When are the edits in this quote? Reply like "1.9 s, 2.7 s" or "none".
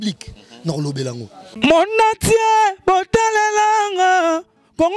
1.5 s